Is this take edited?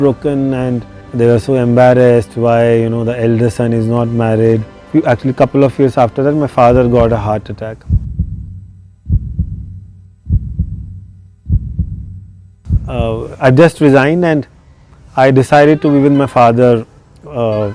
no; 0 cuts

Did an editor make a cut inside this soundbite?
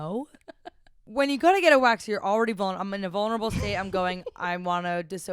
yes; 1 cut; at 1.0 s

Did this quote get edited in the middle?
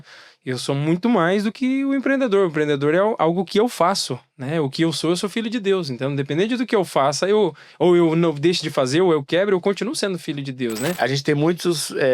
yes; 1 cut; at 11.0 s

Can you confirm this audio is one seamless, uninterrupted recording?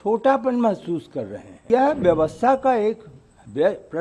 no; 1 cut; at 1.7 s

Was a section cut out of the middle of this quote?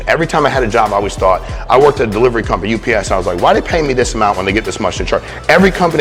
no; 0 cuts

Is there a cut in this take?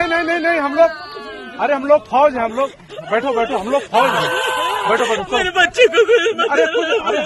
no; 0 cuts

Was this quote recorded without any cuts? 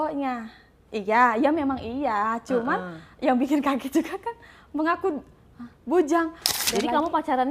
no; 1 cut; at 6.4 s

